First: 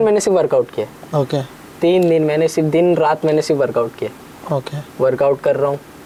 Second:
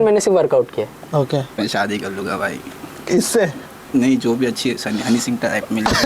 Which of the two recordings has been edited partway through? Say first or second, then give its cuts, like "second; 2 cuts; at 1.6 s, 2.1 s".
second; 1 cut; at 1.5 s